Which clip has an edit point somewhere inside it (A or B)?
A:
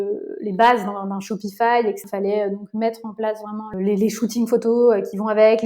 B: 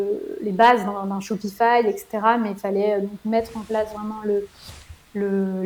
A